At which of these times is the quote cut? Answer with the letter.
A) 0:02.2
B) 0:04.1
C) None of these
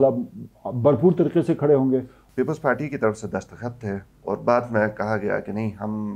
A